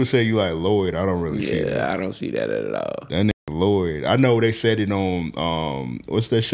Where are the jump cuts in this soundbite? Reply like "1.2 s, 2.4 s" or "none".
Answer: none